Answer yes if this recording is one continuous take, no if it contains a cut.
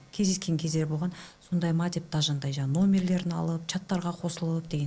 yes